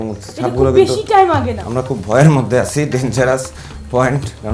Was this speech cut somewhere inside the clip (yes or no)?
yes